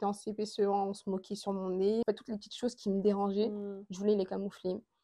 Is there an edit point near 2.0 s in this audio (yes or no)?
yes